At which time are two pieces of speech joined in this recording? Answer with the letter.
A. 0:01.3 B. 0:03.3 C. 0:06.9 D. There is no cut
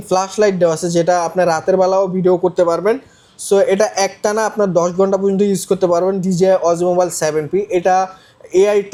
D